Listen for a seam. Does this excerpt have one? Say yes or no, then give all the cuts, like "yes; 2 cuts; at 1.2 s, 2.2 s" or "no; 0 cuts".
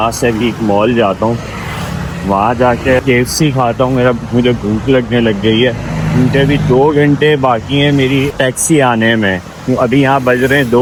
no; 0 cuts